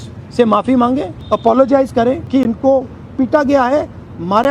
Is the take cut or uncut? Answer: cut